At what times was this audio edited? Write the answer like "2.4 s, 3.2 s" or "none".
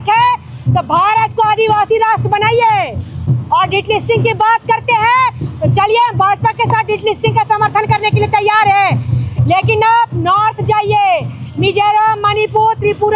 none